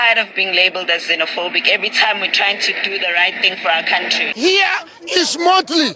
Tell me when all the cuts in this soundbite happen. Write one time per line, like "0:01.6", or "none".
0:04.2